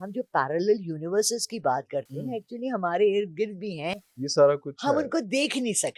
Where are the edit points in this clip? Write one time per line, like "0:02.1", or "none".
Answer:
none